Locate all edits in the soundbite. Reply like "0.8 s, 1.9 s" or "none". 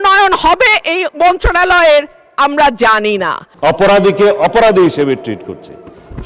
3.4 s